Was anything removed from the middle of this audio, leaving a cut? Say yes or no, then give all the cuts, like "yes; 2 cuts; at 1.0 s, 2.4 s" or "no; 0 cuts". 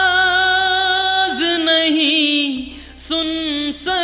no; 0 cuts